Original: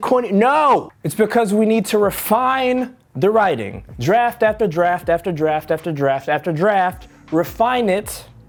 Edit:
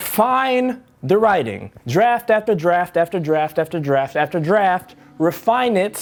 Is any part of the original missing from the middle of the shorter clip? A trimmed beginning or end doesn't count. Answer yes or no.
no